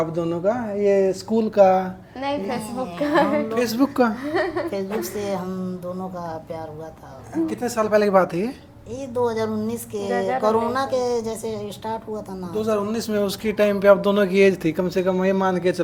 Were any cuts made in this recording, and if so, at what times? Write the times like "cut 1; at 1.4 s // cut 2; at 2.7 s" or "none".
none

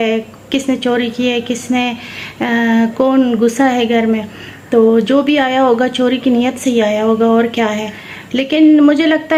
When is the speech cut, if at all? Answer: none

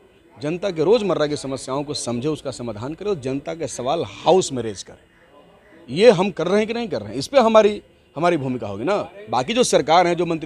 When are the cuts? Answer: none

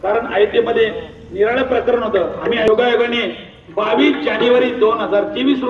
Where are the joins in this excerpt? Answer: cut 1; at 2.7 s

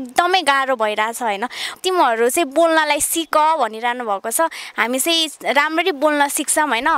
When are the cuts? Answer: cut 1; at 1.7 s

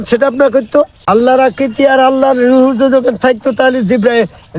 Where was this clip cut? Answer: cut 1; at 1.0 s

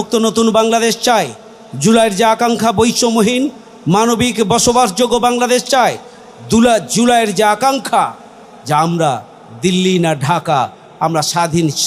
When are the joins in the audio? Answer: none

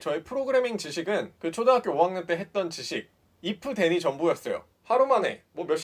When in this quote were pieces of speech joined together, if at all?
cut 1; at 4.7 s

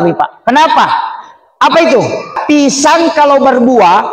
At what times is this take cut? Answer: cut 1; at 2.4 s

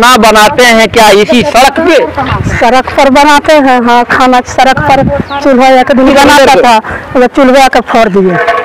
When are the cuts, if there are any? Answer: none

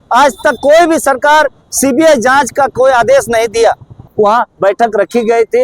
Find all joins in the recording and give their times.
cut 1; at 4.0 s

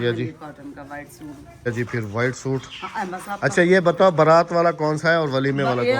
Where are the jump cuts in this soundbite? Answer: cut 1; at 1.7 s

